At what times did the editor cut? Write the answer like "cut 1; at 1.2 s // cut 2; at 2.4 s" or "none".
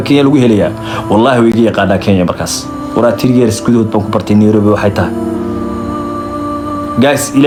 none